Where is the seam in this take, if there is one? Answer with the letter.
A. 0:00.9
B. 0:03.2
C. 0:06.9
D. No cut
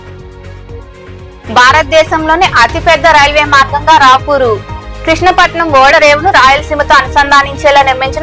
A